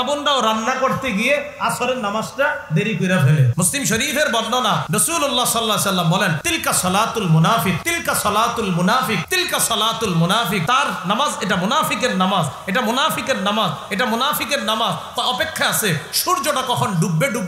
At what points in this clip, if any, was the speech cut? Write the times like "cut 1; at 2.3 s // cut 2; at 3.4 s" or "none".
cut 1; at 3.5 s // cut 2; at 4.8 s // cut 3; at 6.4 s // cut 4; at 7.9 s // cut 5; at 9.3 s // cut 6; at 10.6 s

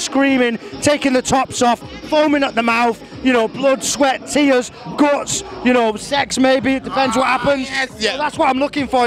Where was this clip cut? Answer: none

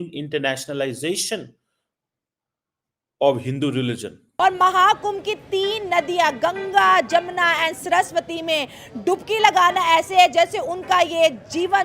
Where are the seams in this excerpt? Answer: cut 1; at 4.2 s

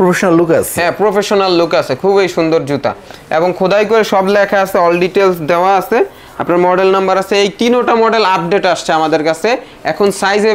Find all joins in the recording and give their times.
none

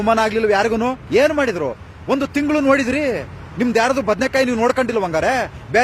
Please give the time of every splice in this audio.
cut 1; at 1.0 s

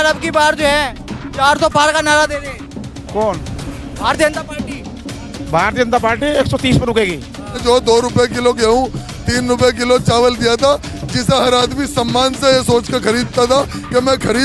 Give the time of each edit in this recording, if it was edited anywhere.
cut 1; at 7.6 s

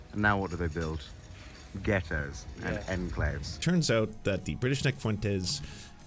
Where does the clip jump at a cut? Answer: cut 1; at 3.6 s

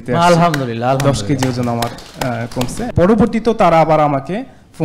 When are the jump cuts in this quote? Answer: cut 1; at 2.8 s

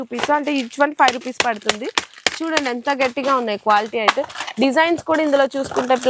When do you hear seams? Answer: none

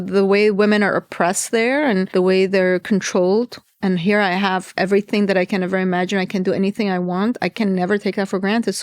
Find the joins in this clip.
cut 1; at 2.1 s

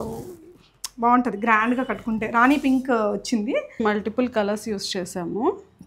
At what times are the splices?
cut 1; at 3.8 s

